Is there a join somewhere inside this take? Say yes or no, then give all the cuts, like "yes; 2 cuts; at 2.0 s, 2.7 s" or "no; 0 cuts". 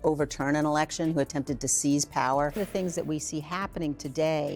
yes; 1 cut; at 2.6 s